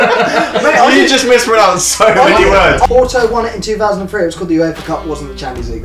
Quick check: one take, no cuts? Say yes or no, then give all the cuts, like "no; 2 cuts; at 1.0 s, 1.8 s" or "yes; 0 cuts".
no; 1 cut; at 2.9 s